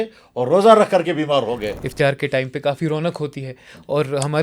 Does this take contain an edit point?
yes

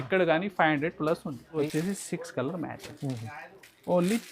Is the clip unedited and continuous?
no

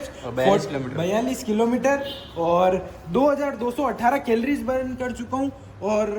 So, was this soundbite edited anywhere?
no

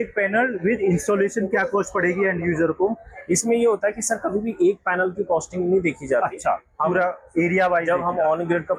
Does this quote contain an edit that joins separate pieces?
no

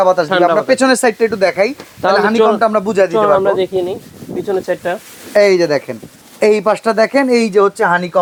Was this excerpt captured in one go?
yes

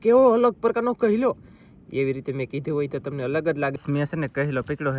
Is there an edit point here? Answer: yes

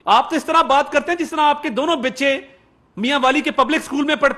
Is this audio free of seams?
yes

